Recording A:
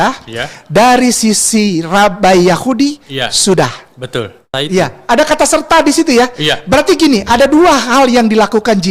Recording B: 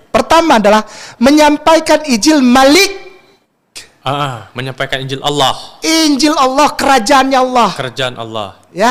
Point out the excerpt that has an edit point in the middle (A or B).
A